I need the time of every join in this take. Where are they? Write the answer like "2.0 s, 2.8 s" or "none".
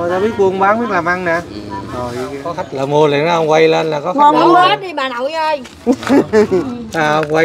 2.4 s